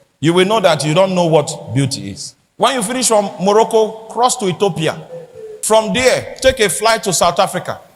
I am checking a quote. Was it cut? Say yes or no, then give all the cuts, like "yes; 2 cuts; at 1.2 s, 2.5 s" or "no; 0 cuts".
no; 0 cuts